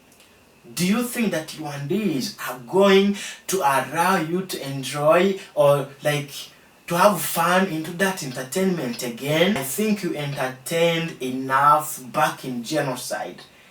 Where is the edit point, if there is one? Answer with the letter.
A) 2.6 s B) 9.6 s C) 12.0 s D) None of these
B